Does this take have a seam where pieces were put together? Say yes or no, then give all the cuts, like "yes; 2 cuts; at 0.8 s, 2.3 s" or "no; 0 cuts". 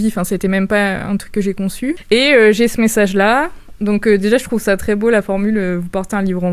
yes; 1 cut; at 2.0 s